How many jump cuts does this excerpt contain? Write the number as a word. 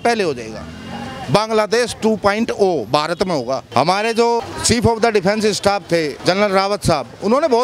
three